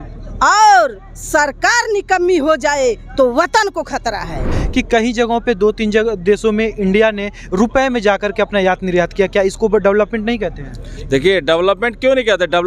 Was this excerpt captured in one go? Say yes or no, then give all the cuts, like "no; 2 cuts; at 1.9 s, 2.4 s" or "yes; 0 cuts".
no; 1 cut; at 4.5 s